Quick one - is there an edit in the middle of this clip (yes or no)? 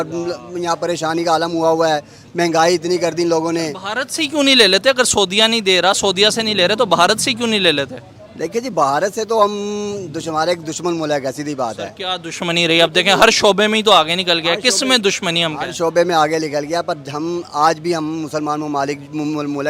no